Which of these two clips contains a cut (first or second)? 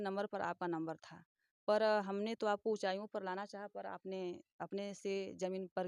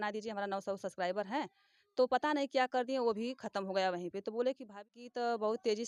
second